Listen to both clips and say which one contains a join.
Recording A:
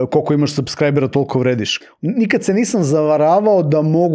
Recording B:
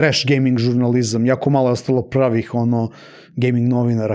A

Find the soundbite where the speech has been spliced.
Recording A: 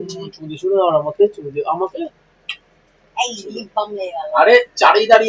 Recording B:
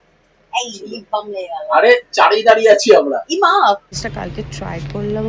B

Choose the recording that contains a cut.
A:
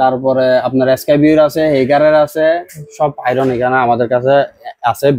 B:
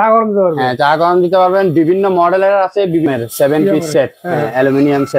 B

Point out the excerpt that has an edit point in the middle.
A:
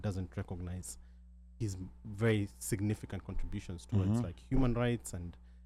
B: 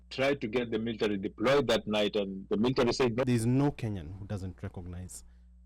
B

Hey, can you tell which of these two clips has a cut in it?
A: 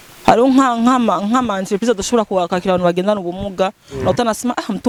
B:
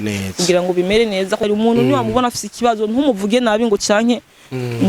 B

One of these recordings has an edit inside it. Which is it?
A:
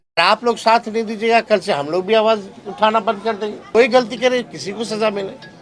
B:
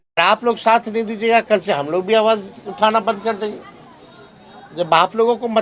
A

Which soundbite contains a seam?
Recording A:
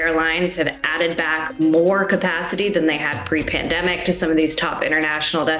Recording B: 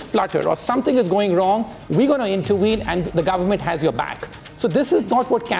B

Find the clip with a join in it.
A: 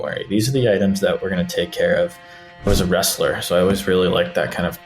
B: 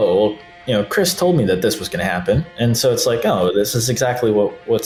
A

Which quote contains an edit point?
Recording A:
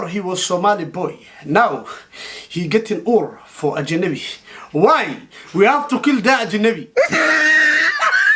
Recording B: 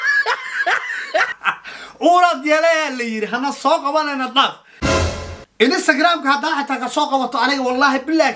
B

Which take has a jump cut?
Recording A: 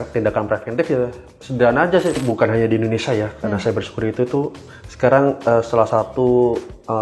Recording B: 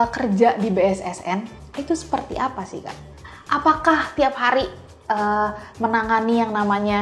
A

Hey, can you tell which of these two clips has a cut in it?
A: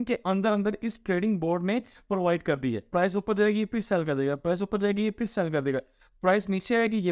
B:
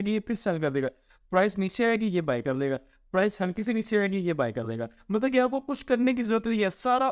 A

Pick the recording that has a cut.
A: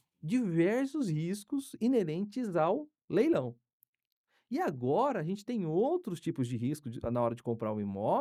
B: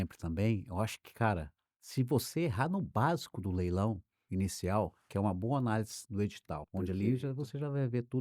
B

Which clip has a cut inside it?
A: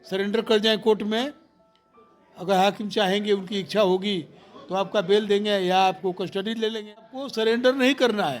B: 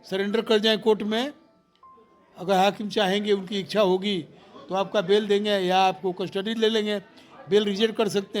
A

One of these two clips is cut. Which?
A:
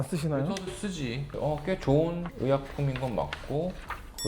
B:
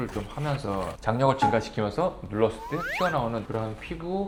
A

